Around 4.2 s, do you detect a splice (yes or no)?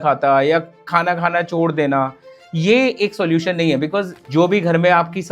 yes